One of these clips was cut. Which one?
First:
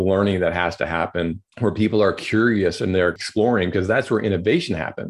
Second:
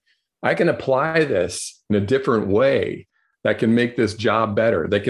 first; 1 cut; at 1.4 s

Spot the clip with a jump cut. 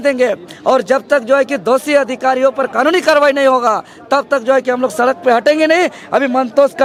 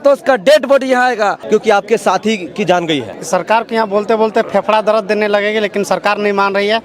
second; 2 cuts; at 1.4 s, 3.2 s

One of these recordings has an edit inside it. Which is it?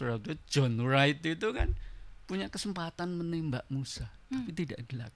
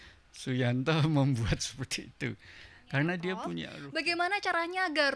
second; 1 cut; at 3.8 s

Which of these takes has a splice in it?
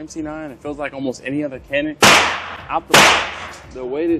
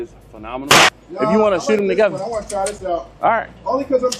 second; 1 cut; at 1.0 s

